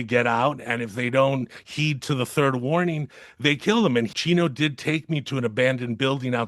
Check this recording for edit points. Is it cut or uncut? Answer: cut